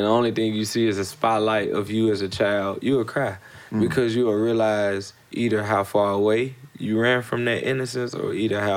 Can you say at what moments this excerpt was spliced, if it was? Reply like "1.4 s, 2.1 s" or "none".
none